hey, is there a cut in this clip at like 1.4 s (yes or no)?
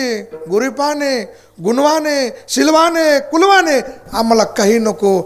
no